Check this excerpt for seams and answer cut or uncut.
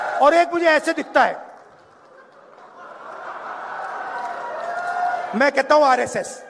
uncut